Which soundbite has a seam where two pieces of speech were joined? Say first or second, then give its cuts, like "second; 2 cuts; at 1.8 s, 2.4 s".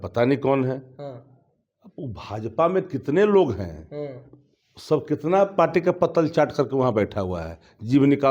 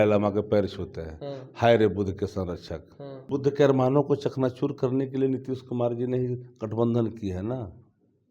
second; 1 cut; at 3.2 s